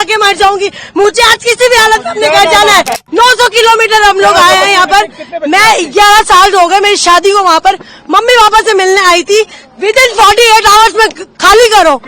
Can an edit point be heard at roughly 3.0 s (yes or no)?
yes